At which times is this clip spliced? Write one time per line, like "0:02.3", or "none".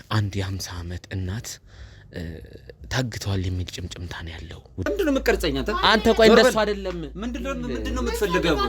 0:04.9